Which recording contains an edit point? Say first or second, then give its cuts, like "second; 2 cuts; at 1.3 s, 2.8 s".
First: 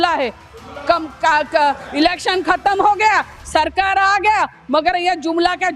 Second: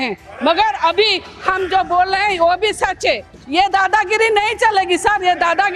second; 1 cut; at 3.4 s